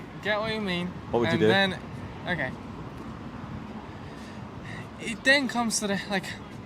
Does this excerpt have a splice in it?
no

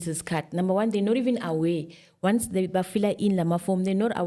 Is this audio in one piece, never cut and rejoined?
yes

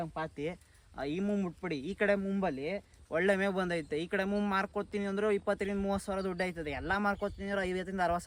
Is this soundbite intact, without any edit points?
yes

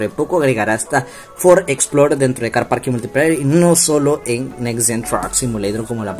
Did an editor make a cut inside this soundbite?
no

